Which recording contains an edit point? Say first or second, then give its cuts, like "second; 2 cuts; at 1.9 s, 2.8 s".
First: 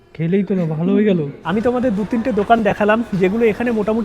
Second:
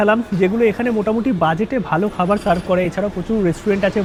first; 1 cut; at 1.4 s